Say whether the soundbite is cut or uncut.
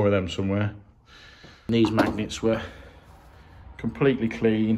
cut